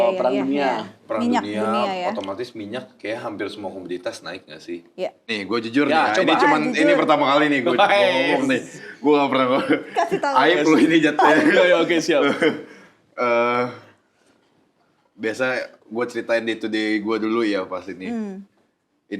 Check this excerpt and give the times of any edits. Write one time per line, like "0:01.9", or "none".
0:05.2